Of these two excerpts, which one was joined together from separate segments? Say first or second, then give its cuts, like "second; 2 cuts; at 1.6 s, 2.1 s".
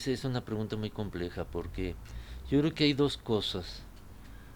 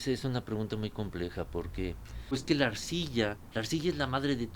second; 1 cut; at 2.4 s